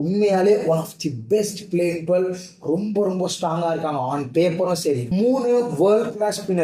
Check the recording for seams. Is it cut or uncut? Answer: cut